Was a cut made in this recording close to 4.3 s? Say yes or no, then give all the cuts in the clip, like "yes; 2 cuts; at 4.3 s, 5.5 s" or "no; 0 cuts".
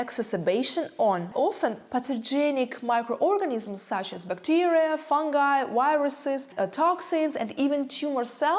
no; 2 cuts; at 1.3 s, 6.5 s